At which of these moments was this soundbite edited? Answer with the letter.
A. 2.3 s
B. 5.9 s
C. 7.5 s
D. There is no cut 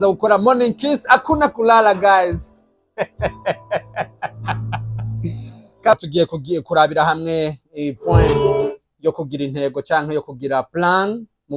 B